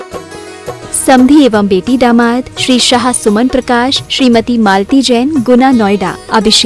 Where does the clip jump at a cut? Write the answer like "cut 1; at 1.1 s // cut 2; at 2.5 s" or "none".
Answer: cut 1; at 1.1 s